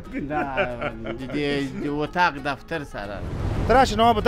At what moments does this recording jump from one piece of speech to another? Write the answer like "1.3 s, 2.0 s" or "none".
3.3 s